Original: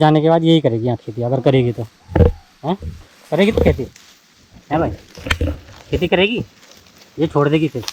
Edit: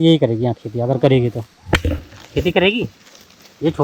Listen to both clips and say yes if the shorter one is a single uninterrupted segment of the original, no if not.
no